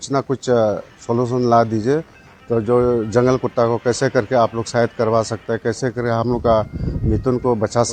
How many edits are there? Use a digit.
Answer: 0